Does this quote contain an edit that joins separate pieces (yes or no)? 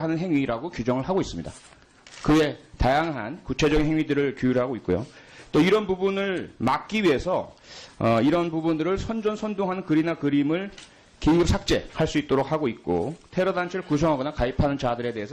yes